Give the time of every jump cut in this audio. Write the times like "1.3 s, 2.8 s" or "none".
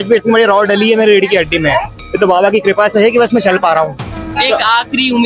4.3 s